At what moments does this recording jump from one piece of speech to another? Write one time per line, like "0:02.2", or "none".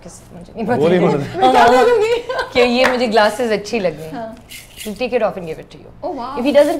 none